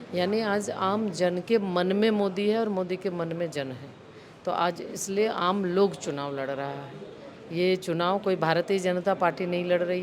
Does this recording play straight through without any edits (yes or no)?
yes